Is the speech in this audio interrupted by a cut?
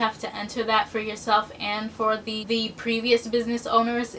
yes; 1 cut; at 2.4 s

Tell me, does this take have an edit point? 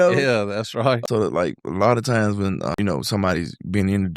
yes; 2 cuts; at 1.0 s, 2.7 s

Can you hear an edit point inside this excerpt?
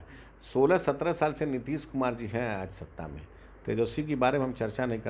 no; 0 cuts

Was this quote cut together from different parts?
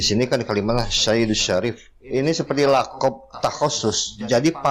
yes; 1 cut; at 1.9 s

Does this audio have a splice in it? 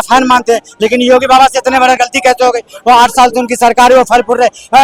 no; 0 cuts

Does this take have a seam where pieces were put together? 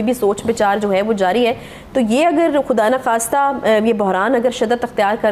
no; 0 cuts

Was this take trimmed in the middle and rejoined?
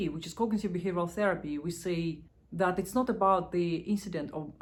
no; 0 cuts

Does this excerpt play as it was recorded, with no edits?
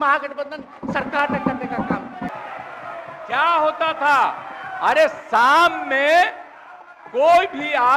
no; 1 cut; at 2.3 s

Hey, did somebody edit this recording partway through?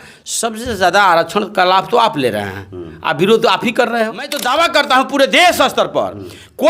yes; 1 cut; at 4.4 s

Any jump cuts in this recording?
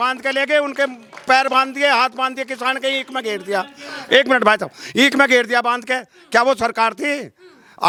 no; 0 cuts

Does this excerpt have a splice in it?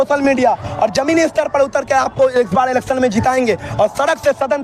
no; 0 cuts

